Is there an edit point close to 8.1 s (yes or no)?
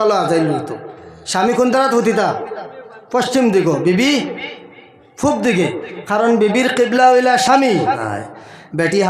yes